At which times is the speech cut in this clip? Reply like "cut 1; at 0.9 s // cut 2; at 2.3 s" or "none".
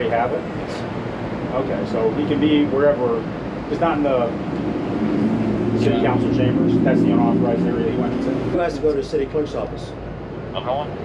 cut 1; at 8.5 s